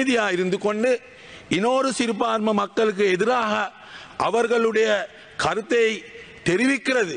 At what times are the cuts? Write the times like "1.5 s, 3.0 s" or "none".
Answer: none